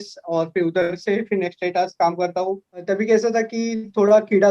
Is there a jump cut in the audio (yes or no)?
yes